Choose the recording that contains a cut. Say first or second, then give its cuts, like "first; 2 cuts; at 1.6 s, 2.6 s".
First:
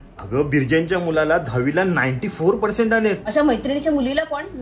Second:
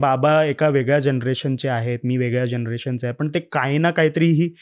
first; 1 cut; at 3.2 s